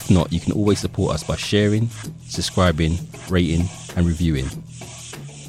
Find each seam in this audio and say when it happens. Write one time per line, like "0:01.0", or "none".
0:04.5